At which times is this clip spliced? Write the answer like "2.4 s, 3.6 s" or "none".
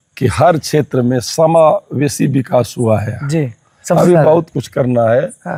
none